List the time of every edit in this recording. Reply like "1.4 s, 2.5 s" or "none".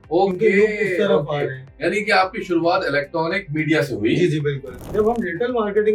4.8 s